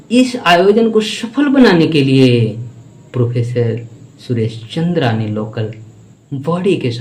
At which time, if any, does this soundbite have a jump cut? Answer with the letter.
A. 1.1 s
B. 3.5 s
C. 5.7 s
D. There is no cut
D